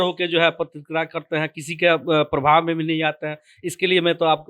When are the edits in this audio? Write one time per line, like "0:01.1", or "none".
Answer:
none